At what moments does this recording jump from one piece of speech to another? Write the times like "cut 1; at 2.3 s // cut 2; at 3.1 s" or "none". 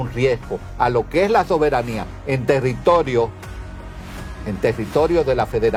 none

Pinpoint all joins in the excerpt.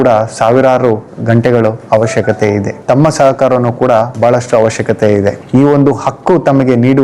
cut 1; at 2.7 s // cut 2; at 5.4 s

